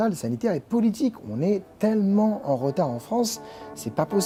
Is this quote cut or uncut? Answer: uncut